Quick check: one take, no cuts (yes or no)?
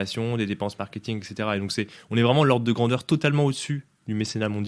yes